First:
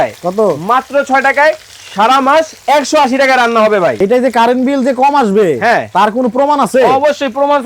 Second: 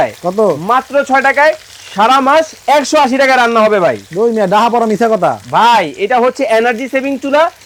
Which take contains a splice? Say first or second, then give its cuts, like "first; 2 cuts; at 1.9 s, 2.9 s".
first; 1 cut; at 4.0 s